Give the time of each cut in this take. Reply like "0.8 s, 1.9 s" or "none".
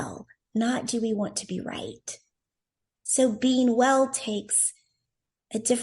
2.7 s